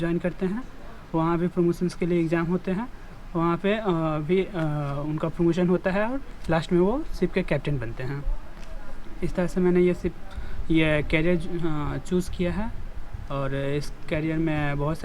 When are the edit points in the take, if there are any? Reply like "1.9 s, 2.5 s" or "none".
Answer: none